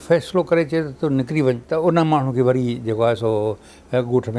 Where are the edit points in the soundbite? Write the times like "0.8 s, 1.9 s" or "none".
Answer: 1.6 s